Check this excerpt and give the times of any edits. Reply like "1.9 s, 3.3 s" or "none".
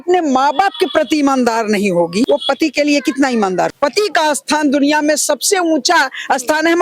2.3 s, 3.7 s